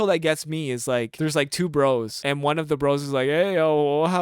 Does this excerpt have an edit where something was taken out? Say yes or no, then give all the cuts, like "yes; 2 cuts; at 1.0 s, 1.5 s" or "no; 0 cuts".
yes; 2 cuts; at 1.1 s, 2.1 s